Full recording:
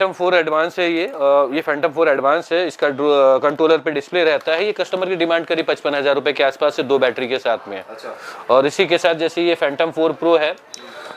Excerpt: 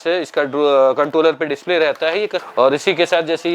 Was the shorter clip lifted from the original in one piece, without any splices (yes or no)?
no